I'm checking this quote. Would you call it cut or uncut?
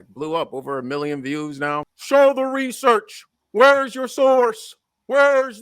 cut